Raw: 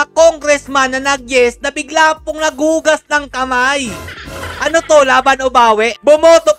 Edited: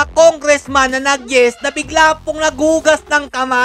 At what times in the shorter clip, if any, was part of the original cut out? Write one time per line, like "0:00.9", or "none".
none